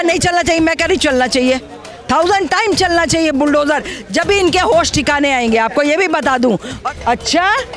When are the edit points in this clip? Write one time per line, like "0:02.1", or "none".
0:06.8